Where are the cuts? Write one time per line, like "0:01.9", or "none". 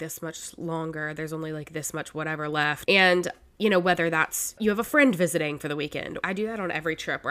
0:02.8
0:04.5
0:05.8